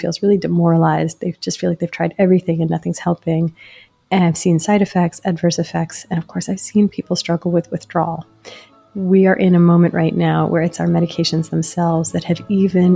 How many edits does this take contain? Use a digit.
1